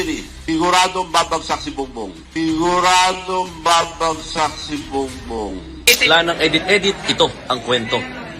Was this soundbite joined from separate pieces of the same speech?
yes; 1 cut; at 6.1 s

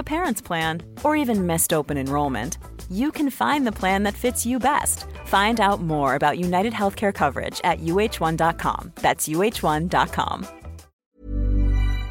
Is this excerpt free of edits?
no; 1 cut; at 11.0 s

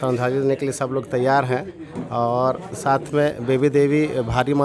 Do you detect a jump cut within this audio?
no; 0 cuts

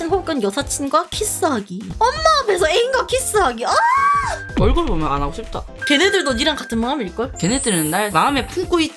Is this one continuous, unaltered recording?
no; 1 cut; at 4.5 s

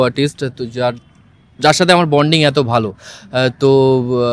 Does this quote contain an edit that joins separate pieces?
no; 0 cuts

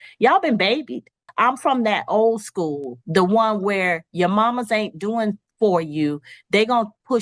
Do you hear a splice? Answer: yes; 1 cut; at 1.2 s

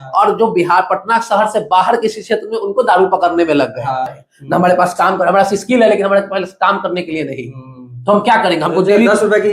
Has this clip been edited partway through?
yes; 1 cut; at 4.2 s

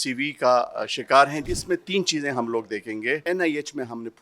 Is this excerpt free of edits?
no; 2 cuts; at 1.5 s, 3.2 s

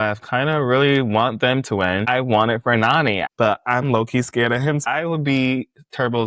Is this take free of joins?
no; 3 cuts; at 2.1 s, 3.2 s, 4.8 s

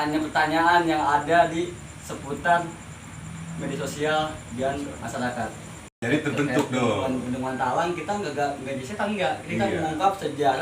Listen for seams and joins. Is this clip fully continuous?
no; 1 cut; at 5.8 s

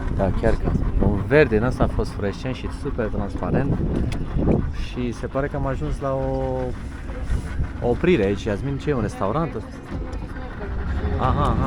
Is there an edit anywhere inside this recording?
no; 0 cuts

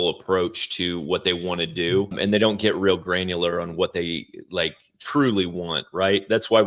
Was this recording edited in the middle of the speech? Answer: yes; 1 cut; at 2.2 s

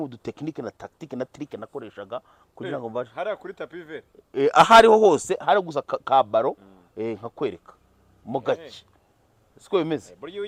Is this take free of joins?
yes; 0 cuts

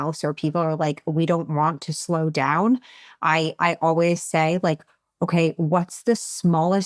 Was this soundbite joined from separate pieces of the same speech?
no; 0 cuts

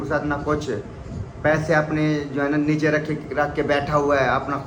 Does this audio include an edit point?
no; 0 cuts

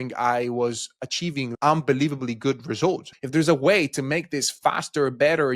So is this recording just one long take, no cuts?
no; 2 cuts; at 1.5 s, 3.1 s

